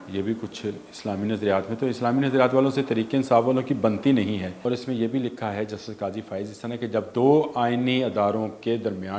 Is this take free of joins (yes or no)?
no